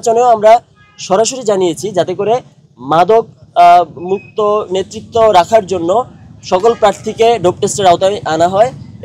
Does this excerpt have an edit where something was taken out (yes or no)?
no